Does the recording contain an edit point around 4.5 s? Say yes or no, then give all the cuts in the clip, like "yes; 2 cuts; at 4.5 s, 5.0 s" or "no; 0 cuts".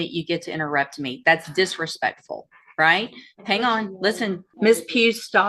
yes; 1 cut; at 4.5 s